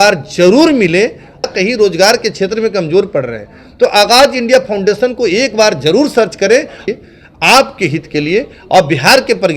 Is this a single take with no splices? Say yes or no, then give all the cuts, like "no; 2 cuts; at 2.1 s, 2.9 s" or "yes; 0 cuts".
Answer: no; 2 cuts; at 1.4 s, 6.8 s